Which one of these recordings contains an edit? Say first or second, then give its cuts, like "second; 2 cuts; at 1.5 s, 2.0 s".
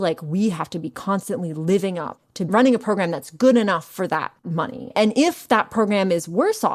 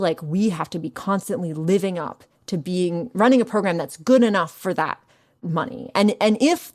first; 2 cuts; at 2.4 s, 4.9 s